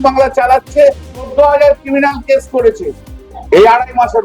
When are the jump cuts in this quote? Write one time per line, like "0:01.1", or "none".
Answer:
0:01.1